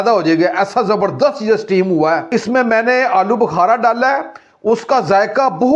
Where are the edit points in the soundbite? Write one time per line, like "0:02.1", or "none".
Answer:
0:02.3